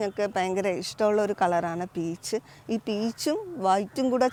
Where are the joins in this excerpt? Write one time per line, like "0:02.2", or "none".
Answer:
none

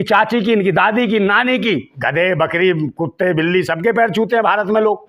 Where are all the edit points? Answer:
0:02.0

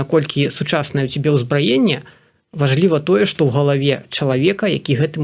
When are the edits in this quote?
none

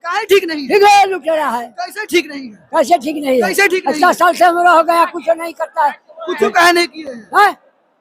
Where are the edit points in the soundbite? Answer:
none

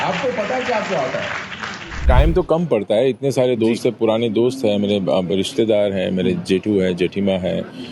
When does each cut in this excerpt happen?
0:02.0

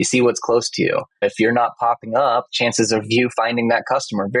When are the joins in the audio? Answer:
0:01.2
0:02.5

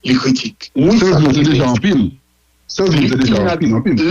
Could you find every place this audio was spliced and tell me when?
0:00.9

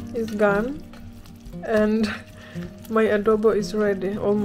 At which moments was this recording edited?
none

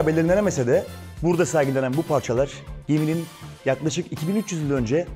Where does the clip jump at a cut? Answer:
0:01.0

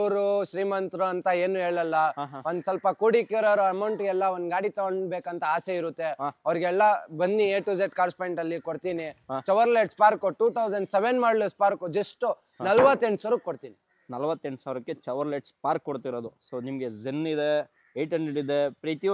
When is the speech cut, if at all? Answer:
none

